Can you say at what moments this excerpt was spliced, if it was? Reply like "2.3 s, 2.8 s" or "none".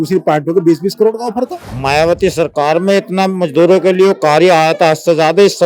1.6 s